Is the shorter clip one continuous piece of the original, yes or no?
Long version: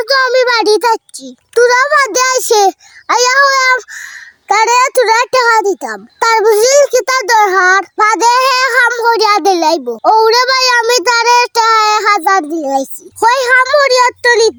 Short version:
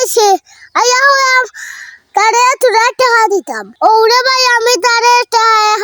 no